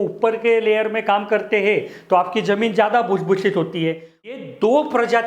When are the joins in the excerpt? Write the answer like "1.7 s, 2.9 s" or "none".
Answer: 4.3 s